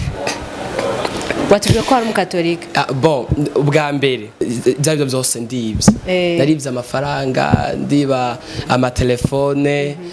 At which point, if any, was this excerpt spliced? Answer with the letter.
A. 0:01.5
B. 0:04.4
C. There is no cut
B